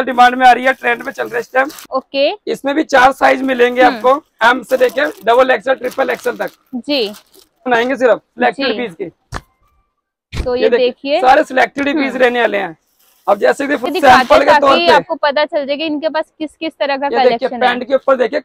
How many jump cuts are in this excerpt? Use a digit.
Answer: 3